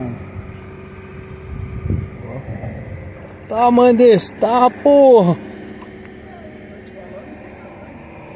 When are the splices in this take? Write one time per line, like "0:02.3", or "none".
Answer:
none